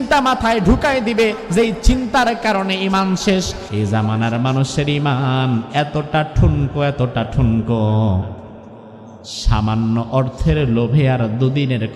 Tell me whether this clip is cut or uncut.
cut